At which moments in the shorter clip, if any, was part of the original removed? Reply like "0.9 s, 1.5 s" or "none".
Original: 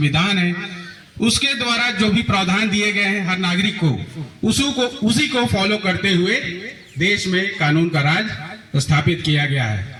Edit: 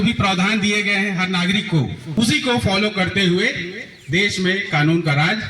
2.1 s